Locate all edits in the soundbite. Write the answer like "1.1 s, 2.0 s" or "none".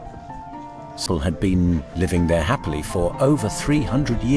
1.0 s